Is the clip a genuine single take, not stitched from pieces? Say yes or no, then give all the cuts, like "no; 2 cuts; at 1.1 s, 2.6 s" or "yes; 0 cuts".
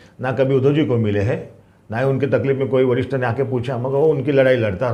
yes; 0 cuts